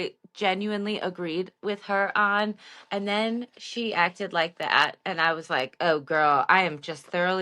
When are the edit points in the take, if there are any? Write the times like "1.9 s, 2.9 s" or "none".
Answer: none